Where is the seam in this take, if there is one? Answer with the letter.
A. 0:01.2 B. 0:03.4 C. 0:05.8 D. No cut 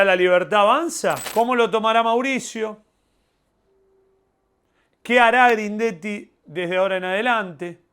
A